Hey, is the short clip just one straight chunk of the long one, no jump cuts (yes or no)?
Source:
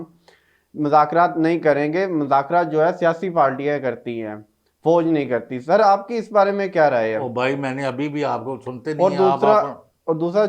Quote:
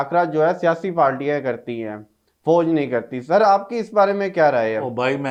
yes